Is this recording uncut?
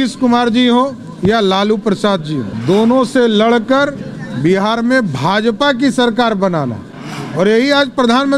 no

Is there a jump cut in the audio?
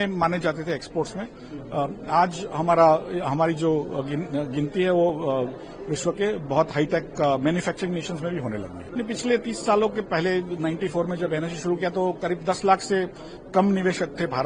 yes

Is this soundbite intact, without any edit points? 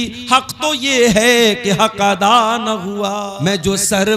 no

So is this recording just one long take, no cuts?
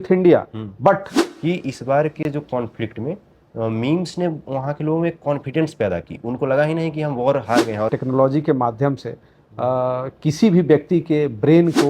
no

